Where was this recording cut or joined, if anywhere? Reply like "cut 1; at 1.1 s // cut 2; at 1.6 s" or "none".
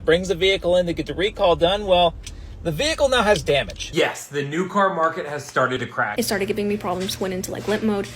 cut 1; at 3.9 s // cut 2; at 6.1 s

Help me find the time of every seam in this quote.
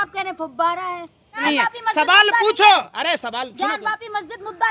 cut 1; at 1.4 s

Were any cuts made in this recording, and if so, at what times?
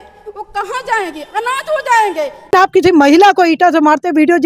cut 1; at 2.5 s

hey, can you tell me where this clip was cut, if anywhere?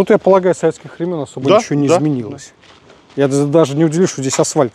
none

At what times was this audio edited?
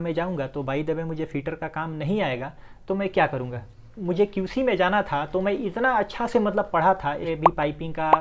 cut 1; at 3.9 s // cut 2; at 7.2 s

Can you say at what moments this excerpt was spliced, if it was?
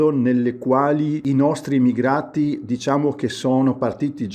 cut 1; at 1.2 s

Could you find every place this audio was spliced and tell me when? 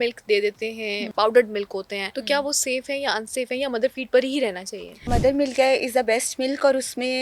cut 1; at 1.1 s // cut 2; at 2.1 s // cut 3; at 5.1 s

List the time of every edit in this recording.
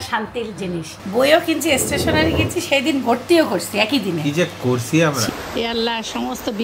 cut 1; at 1.0 s // cut 2; at 5.2 s

